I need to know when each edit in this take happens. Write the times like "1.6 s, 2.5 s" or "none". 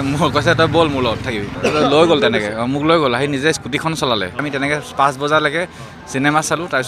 1.5 s, 4.4 s